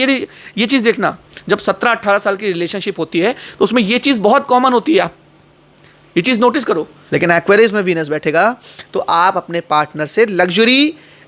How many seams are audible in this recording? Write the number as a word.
one